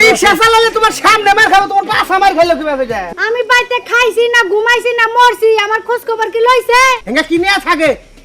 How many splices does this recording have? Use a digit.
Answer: 2